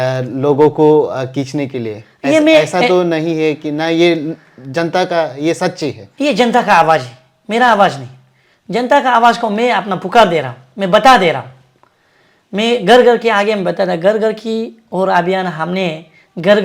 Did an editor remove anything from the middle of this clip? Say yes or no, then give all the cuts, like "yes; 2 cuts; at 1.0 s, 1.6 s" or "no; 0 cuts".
no; 0 cuts